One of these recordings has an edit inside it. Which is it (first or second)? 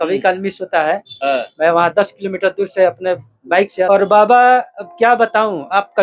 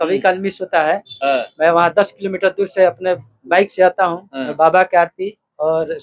first